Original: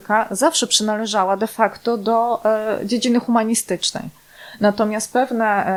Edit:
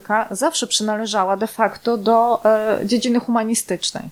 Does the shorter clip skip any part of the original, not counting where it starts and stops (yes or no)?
no